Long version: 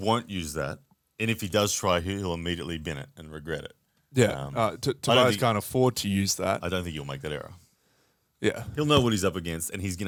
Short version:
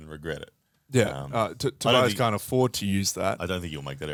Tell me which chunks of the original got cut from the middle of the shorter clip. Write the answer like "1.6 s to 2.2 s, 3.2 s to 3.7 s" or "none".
none